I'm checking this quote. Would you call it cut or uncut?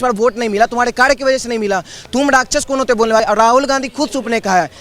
cut